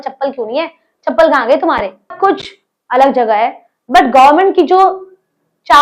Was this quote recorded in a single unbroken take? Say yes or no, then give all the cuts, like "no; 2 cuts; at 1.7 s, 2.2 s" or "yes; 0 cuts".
no; 1 cut; at 2.1 s